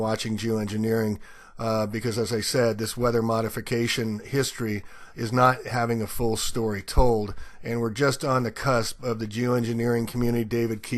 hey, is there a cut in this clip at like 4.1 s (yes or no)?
yes